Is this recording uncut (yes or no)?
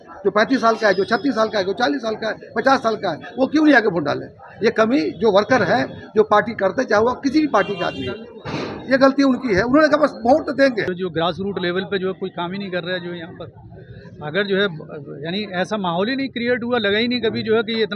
no